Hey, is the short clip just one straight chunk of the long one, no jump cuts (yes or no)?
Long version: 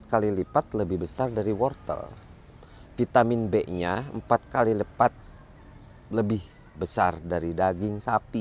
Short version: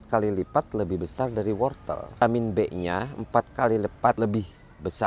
no